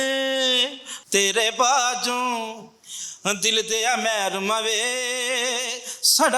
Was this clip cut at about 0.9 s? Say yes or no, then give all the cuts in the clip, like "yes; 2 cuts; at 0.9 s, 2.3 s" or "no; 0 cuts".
yes; 1 cut; at 0.9 s